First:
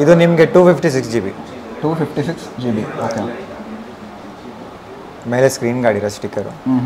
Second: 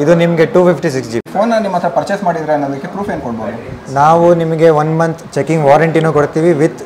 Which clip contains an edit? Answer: second; 1 cut; at 1.3 s

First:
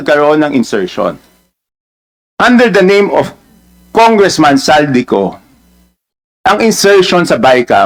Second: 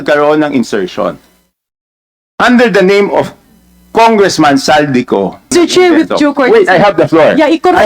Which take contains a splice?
second; 1 cut; at 5.5 s

